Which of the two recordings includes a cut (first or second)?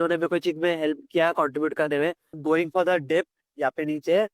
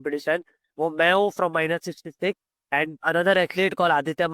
first